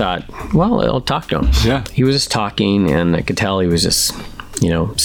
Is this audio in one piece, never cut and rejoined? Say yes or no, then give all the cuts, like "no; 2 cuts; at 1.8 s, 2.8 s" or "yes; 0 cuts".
no; 1 cut; at 1.9 s